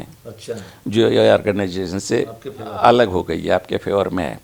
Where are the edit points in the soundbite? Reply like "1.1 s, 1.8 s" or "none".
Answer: none